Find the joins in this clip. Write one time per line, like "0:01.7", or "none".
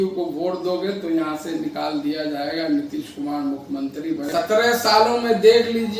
0:04.4